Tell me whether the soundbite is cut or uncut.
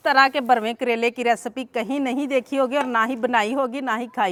uncut